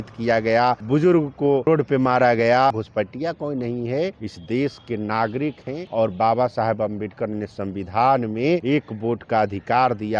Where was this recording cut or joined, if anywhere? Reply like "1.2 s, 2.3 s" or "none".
0.8 s, 1.7 s, 2.8 s, 4.3 s, 5.7 s, 8.6 s